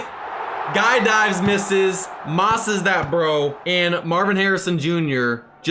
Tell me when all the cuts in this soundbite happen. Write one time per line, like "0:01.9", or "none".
0:03.6

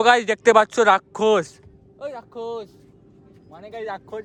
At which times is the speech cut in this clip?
none

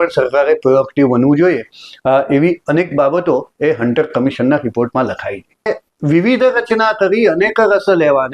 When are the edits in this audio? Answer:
0:05.7

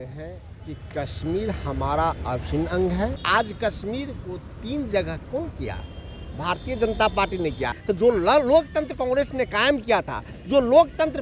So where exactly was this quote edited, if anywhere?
0:03.2
0:07.7

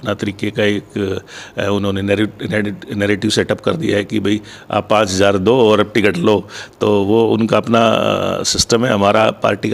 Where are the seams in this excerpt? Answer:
none

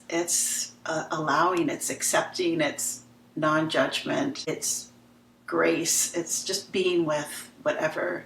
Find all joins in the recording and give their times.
0:04.4

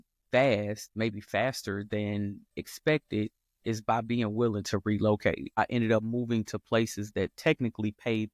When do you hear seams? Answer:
0:05.6

